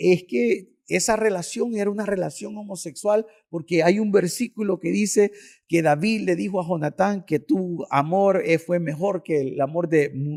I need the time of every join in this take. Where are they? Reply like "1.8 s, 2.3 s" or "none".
none